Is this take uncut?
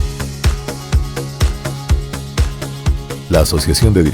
no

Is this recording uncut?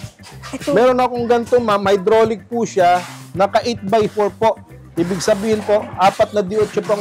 yes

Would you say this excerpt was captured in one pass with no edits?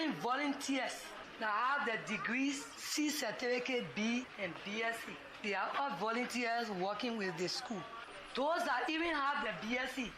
yes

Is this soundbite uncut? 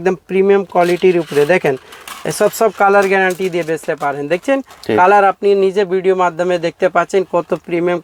yes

